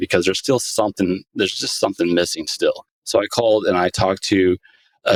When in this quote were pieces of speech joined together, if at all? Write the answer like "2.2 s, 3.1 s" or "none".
none